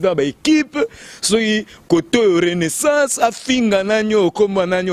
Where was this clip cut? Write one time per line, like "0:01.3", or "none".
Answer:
none